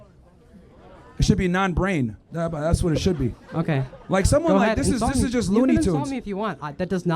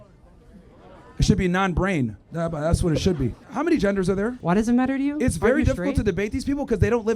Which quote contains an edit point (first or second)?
second